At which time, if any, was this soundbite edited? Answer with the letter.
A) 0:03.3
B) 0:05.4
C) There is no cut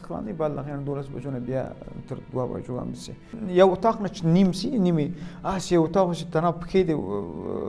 A